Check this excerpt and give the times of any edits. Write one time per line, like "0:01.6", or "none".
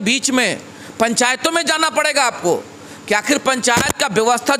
none